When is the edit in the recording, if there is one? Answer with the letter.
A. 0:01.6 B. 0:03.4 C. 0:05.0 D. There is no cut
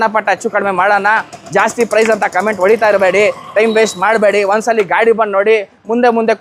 D